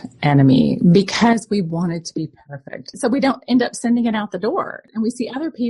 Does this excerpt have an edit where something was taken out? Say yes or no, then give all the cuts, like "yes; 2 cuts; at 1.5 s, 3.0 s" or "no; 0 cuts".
yes; 2 cuts; at 3.0 s, 4.8 s